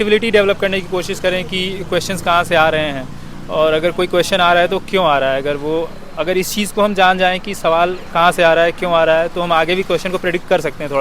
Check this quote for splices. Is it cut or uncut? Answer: uncut